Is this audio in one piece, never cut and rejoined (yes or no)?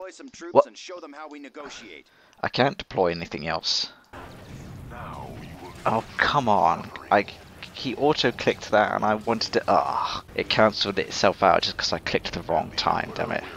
no